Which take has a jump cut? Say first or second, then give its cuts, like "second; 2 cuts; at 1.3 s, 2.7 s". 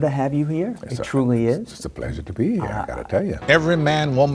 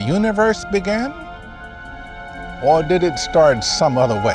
first; 1 cut; at 3.4 s